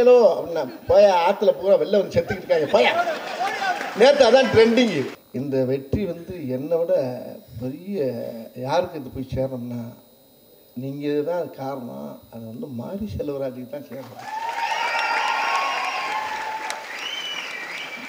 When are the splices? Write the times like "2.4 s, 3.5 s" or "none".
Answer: 5.2 s